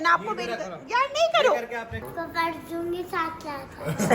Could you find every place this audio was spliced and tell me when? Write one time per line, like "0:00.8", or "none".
0:02.0